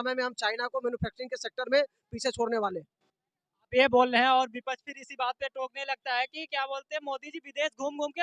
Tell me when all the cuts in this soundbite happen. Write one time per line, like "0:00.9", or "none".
none